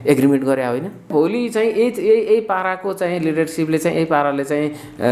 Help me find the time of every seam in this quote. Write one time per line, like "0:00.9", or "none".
0:01.1